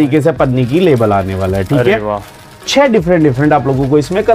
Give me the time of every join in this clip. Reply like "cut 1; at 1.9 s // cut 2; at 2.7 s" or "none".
none